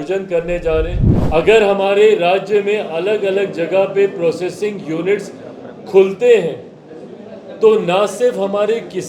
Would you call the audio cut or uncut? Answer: cut